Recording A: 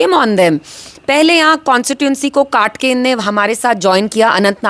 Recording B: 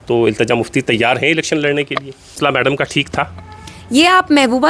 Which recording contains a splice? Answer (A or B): B